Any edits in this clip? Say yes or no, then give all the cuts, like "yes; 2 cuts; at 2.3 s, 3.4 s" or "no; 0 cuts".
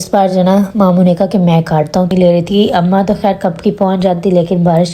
yes; 1 cut; at 2.1 s